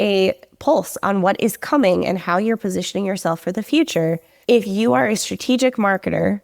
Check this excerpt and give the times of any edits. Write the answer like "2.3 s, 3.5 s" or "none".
4.3 s

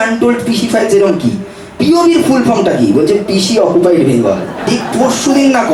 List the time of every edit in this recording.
4.7 s

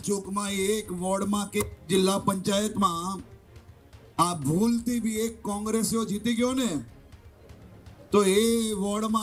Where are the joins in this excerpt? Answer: none

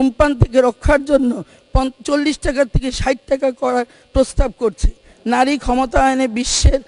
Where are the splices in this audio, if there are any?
5.1 s

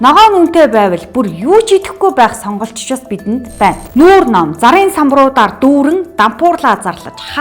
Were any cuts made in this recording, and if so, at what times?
3.8 s

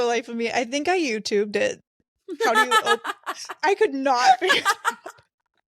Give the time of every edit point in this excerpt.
none

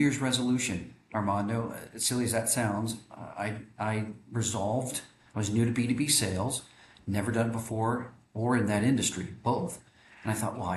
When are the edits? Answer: none

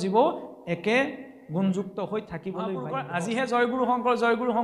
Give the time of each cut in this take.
2.9 s

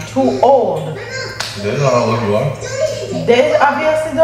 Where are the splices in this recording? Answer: none

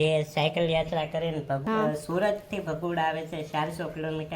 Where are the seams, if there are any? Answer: 1.6 s

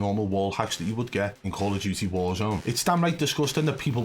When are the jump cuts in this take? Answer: 1.4 s, 2.6 s

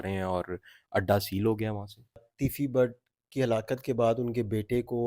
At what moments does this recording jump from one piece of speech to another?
2.2 s

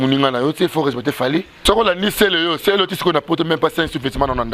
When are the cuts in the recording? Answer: 1.6 s

